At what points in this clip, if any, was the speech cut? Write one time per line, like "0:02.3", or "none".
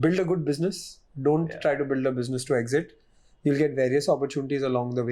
none